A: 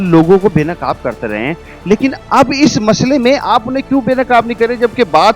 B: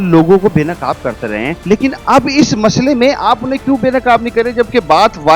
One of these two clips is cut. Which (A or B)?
B